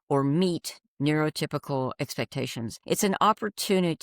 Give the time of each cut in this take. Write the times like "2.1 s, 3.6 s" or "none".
2.8 s